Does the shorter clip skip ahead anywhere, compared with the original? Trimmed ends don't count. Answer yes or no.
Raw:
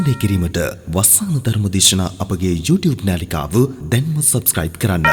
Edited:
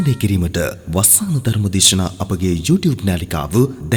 no